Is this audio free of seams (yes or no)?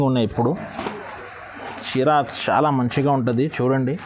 yes